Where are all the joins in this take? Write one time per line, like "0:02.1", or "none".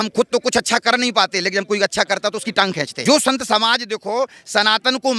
0:02.9